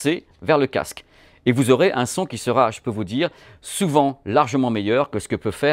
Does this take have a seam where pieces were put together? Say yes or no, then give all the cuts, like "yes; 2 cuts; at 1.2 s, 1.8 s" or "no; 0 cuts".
no; 0 cuts